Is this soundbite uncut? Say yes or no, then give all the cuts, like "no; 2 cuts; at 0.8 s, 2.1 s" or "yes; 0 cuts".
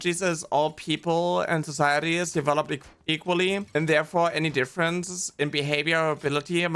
yes; 0 cuts